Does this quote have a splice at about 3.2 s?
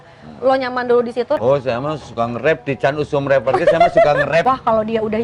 no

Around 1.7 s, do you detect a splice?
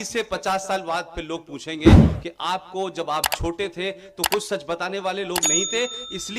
yes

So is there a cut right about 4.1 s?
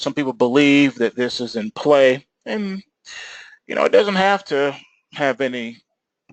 no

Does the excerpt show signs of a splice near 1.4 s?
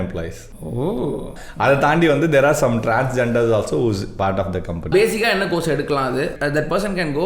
yes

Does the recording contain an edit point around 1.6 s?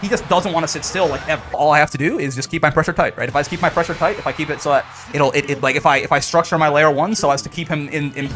yes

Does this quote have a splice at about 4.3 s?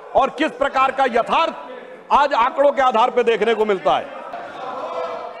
yes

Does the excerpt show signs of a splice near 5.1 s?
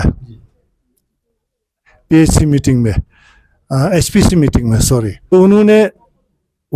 yes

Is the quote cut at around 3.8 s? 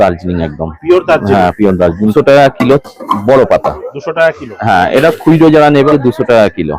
no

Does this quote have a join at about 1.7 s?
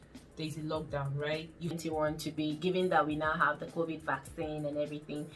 yes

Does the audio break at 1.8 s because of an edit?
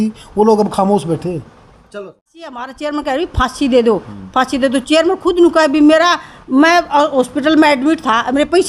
yes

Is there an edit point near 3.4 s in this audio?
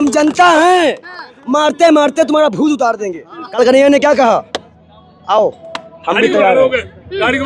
yes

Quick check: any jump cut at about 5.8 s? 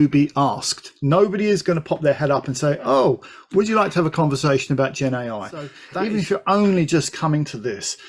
yes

